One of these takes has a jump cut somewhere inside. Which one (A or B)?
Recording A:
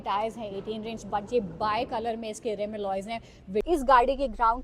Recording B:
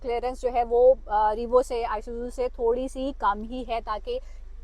A